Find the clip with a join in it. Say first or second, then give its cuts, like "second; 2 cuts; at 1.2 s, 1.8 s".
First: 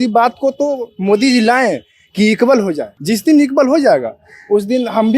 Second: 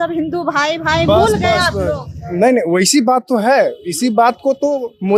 first; 1 cut; at 2.9 s